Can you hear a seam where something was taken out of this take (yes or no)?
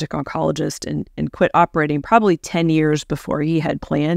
no